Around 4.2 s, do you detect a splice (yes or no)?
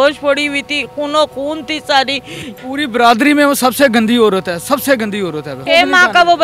no